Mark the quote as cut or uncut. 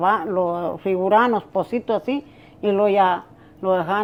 uncut